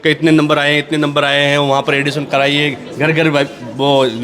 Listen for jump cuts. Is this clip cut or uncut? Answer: uncut